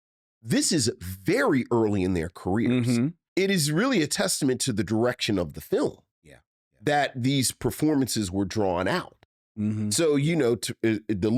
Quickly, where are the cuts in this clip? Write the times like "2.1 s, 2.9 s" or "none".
3.2 s